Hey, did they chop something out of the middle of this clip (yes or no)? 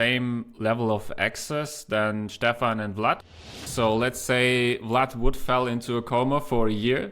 yes